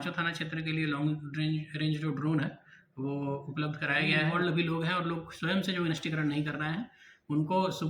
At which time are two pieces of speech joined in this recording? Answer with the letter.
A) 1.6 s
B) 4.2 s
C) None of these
B